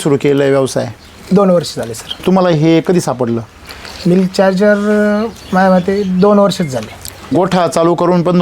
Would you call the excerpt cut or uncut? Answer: cut